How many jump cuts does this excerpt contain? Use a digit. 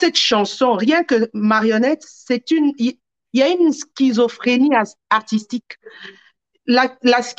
0